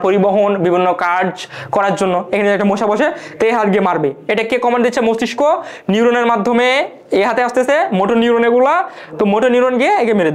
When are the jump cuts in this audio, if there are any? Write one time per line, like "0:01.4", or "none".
none